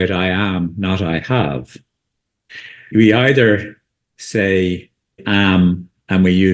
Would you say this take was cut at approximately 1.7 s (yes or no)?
no